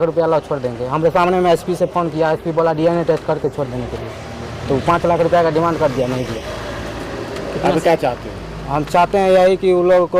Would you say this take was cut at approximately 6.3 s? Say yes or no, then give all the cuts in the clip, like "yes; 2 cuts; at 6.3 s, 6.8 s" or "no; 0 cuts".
no; 0 cuts